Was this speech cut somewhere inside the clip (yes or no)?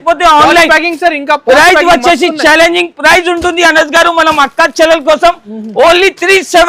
no